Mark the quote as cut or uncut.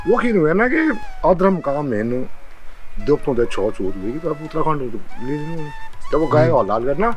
cut